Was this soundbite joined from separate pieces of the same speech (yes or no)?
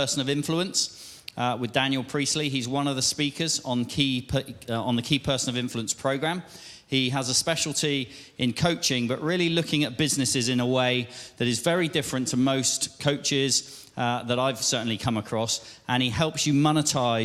no